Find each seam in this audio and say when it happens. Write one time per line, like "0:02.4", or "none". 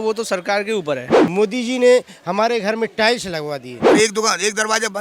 0:01.1
0:03.8